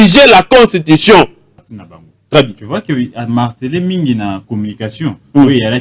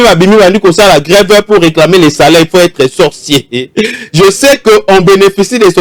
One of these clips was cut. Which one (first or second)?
first